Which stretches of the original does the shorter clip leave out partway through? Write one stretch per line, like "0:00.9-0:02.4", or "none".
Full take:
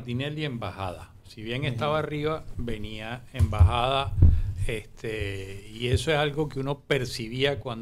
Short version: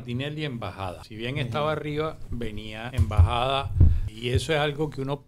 0:01.1-0:01.3
0:03.1-0:03.3
0:04.5-0:05.6

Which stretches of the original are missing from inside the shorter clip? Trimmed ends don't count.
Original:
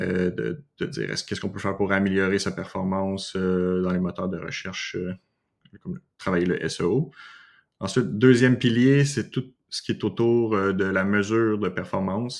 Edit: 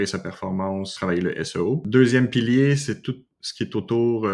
0:03.2-0:06.1
0:07.1-0:08.1

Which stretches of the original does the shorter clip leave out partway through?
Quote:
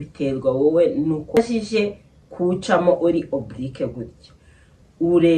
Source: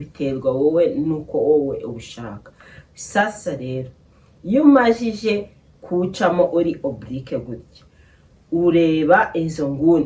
0:01.4-0:04.9

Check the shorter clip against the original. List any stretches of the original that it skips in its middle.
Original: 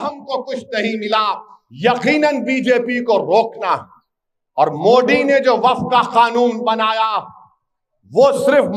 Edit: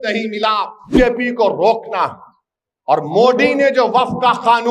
0:01.6-0:02.6

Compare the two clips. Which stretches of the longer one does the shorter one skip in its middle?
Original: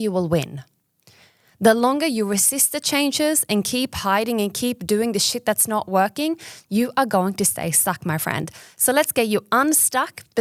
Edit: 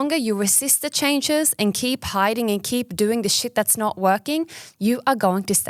none

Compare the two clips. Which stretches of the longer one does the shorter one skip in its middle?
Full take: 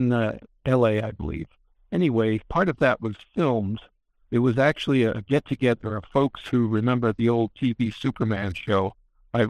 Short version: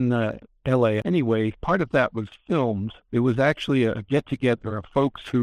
0:01.0-0:01.9
0:03.8-0:04.1

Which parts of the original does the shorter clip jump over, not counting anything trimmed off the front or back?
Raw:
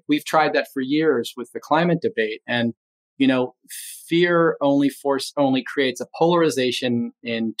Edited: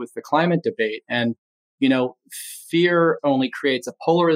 0:04.6-0:05.3

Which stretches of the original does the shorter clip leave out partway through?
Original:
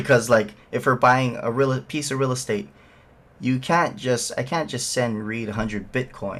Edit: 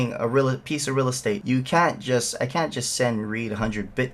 0:02.6-0:03.4

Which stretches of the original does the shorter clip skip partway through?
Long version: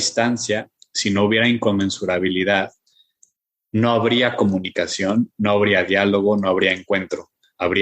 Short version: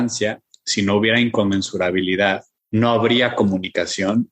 0:02.8-0:03.5

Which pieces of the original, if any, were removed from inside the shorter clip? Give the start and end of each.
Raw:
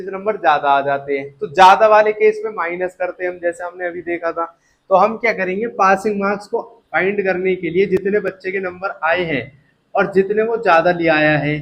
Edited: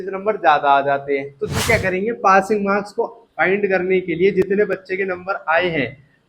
0:01.6-0:05.1

